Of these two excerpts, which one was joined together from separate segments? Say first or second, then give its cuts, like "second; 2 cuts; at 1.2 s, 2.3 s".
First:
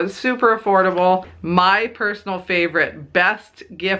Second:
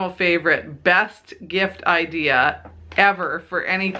first; 1 cut; at 1.3 s